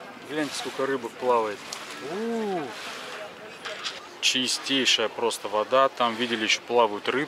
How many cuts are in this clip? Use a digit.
1